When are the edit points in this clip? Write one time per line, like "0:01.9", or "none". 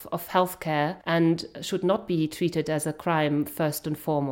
0:01.0